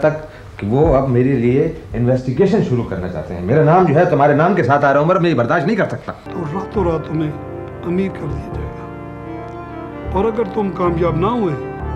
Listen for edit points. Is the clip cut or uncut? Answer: cut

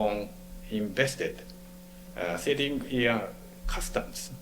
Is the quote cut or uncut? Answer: uncut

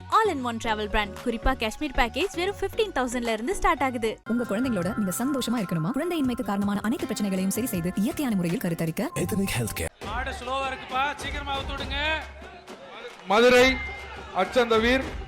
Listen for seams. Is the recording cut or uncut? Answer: cut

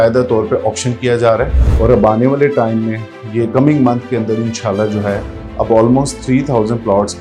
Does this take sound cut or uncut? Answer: cut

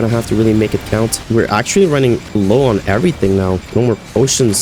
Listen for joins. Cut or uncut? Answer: cut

